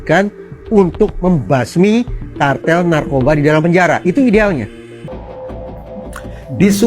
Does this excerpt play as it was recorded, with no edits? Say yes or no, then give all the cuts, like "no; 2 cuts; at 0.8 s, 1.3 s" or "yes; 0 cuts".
no; 1 cut; at 5.1 s